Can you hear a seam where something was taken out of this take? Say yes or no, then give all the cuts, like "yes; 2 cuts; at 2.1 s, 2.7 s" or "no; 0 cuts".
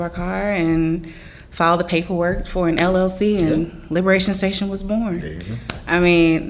no; 0 cuts